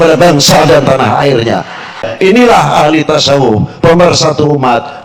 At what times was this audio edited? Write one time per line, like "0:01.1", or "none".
0:02.1